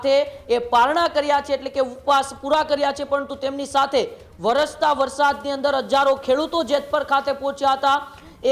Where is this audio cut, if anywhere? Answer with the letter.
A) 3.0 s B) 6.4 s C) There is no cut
C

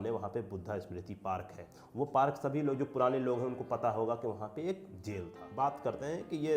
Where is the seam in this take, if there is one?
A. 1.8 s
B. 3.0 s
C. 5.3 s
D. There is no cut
C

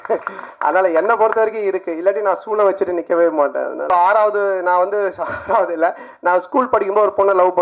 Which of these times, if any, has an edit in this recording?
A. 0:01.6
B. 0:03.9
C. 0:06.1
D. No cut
B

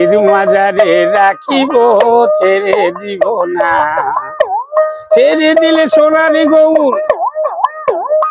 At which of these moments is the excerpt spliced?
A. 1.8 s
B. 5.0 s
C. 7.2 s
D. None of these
D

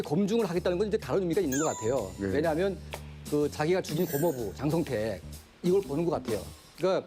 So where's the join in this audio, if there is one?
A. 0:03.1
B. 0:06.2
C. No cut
C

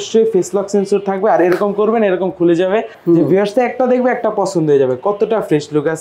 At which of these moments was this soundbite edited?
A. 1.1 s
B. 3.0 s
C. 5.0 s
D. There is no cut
B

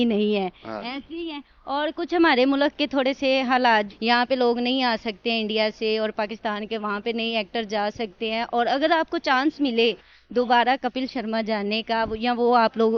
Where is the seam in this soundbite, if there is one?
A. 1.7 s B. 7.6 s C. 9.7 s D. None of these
D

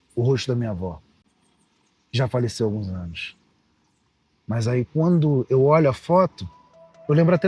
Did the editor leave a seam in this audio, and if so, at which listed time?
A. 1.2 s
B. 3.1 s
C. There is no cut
C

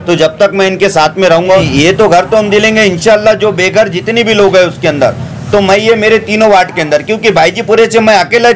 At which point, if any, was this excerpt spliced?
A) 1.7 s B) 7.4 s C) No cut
A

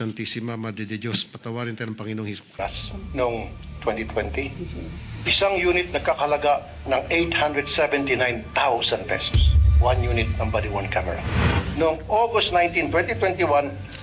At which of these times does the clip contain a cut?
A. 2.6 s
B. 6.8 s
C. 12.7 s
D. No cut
A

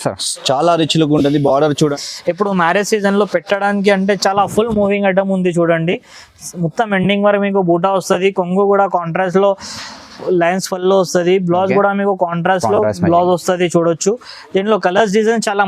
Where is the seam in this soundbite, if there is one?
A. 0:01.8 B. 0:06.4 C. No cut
A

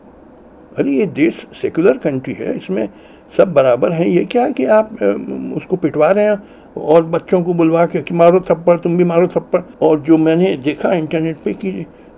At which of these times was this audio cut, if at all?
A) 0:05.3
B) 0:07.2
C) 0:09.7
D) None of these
C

